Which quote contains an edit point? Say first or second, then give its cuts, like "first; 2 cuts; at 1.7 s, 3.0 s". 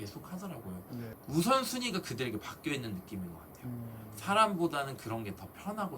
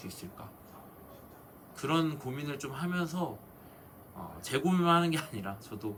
first; 1 cut; at 1.1 s